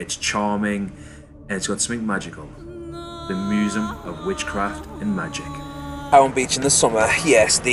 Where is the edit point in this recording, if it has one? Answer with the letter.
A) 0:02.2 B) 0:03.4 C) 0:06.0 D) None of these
C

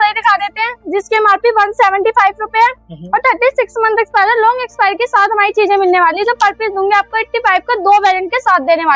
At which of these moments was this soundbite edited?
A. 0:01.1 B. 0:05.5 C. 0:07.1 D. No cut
D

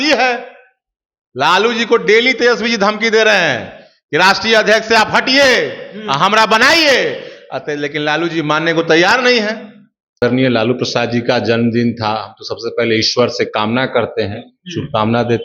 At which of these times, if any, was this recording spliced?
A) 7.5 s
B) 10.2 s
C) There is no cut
B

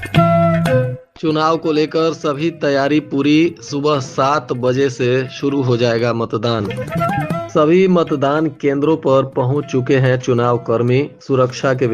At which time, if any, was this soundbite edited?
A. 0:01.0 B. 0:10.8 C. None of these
A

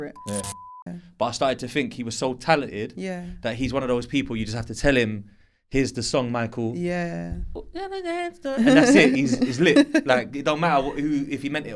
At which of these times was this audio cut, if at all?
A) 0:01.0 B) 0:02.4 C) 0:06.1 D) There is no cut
A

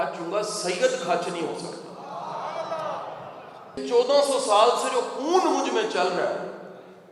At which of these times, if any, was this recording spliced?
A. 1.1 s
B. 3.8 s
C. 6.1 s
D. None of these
B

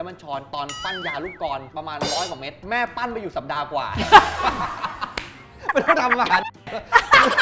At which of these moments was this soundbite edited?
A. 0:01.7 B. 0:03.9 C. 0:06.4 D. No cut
A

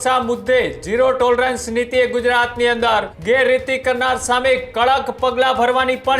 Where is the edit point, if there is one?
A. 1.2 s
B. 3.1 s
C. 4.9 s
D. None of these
B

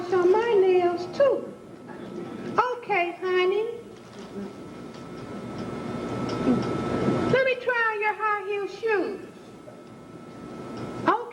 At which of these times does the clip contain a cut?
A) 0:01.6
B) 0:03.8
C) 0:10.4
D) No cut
D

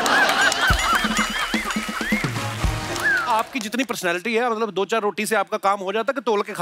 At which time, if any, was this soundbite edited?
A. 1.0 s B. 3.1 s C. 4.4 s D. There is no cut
B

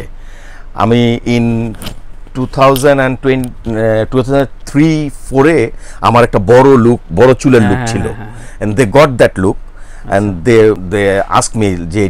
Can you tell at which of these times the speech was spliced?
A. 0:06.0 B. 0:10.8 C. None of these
B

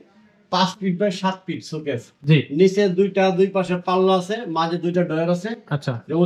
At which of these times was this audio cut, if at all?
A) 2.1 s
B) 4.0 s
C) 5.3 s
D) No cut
D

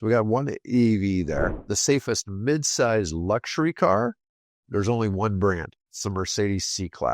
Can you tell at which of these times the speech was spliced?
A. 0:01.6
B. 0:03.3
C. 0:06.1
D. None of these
A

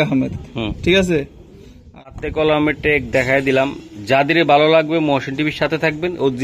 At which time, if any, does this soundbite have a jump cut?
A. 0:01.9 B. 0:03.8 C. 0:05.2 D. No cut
A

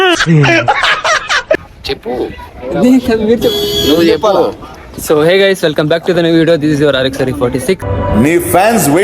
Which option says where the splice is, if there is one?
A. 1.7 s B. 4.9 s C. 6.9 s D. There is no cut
A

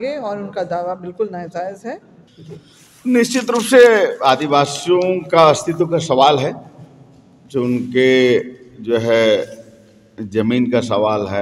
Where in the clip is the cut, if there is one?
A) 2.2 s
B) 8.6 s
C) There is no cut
A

